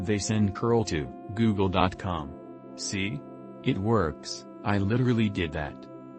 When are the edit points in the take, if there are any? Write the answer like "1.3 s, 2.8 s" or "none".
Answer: 1.1 s, 2.9 s